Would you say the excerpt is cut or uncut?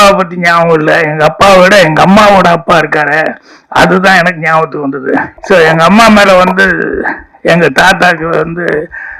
cut